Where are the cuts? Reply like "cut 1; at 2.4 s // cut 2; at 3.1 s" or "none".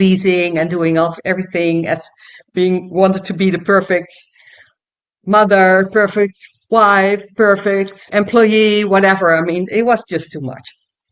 none